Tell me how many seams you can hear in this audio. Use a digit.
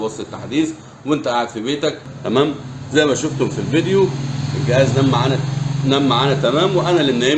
1